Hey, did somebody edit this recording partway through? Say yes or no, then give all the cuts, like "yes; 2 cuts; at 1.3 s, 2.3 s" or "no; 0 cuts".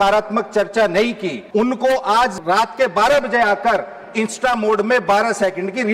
yes; 2 cuts; at 1.3 s, 2.3 s